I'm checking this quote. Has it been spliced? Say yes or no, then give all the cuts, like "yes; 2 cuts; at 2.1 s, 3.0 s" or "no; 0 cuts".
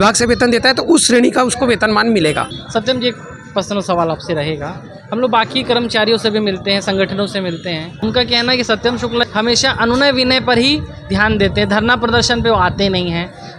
yes; 3 cuts; at 2.5 s, 8.0 s, 9.3 s